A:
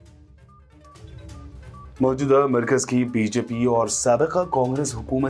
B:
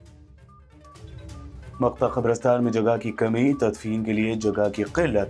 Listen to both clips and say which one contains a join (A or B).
B